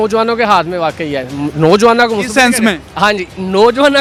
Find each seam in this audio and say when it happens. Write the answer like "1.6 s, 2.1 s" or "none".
none